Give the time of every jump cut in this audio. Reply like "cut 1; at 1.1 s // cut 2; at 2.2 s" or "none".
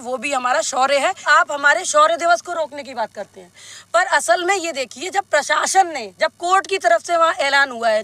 cut 1; at 1.3 s